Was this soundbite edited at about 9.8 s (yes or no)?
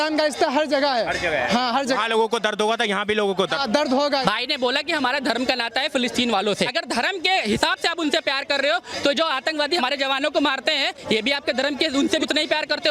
yes